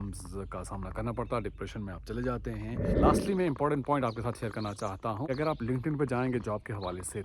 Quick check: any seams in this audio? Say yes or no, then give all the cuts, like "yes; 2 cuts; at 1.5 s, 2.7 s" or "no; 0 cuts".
yes; 2 cuts; at 2.9 s, 5.3 s